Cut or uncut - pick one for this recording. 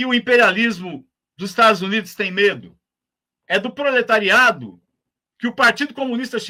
uncut